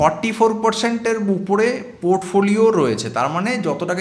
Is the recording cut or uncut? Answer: uncut